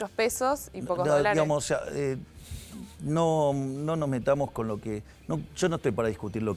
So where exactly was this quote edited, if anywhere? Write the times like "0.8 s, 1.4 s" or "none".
none